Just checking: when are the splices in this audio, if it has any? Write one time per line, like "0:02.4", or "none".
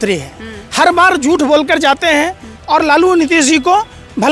none